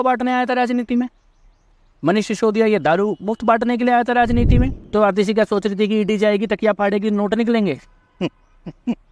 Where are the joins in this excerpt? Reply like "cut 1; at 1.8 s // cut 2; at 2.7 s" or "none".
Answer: cut 1; at 4.8 s